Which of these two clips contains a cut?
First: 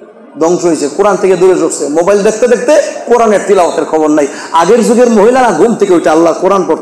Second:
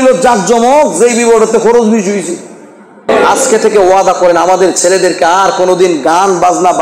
second; 1 cut; at 3.1 s

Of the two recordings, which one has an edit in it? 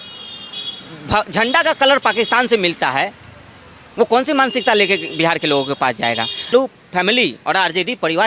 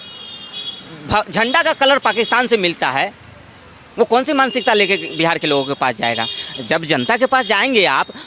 first; 1 cut; at 6.5 s

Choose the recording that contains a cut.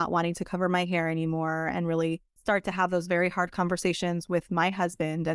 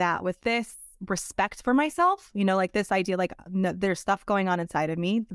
first; 1 cut; at 2.3 s

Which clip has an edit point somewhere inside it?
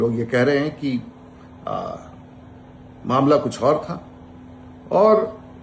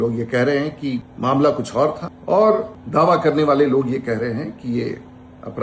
second; 3 cuts; at 1.1 s, 2.1 s, 2.8 s

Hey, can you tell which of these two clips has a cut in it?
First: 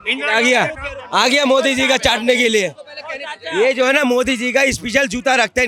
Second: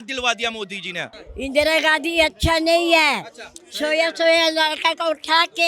second; 1 cut; at 1.2 s

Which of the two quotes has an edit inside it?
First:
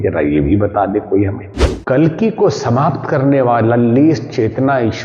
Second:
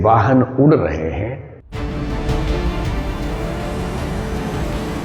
first; 1 cut; at 1.6 s

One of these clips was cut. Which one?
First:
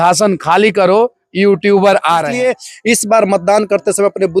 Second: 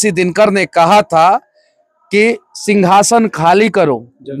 first; 1 cut; at 2.3 s

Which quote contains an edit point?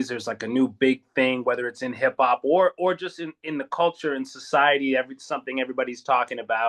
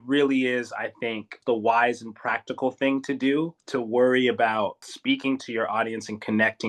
second; 3 cuts; at 1.4 s, 3.6 s, 4.9 s

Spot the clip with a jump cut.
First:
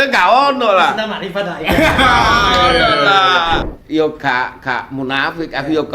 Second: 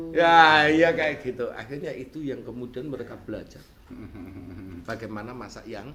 first; 1 cut; at 3.7 s

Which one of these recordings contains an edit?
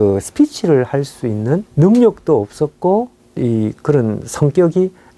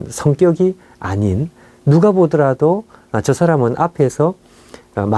first; 2 cuts; at 1.7 s, 3.2 s

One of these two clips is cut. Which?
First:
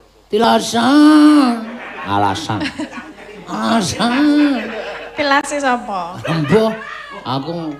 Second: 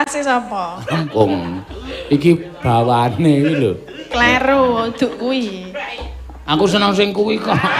second; 1 cut; at 1.1 s

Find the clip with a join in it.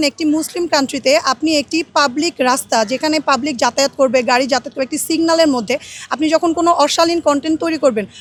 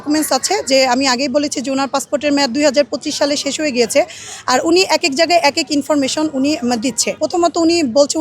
second; 1 cut; at 7.2 s

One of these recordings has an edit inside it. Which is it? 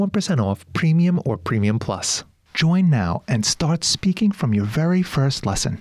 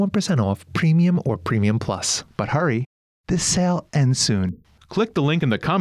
first; 1 cut; at 2.2 s

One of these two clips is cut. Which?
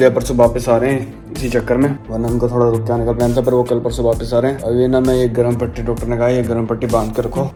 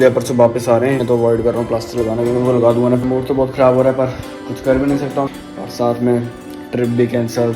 second; 3 cuts; at 1.0 s, 3.1 s, 5.4 s

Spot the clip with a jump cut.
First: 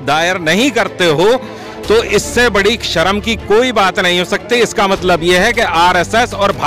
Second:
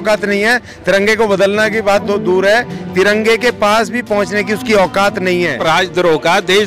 second; 1 cut; at 5.6 s

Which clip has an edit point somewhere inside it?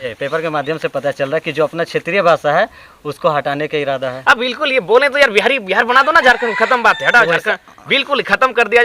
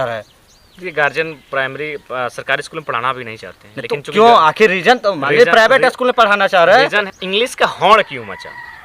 second; 1 cut; at 7.1 s

